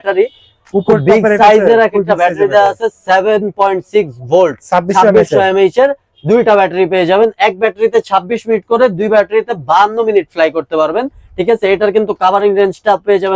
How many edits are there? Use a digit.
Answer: 0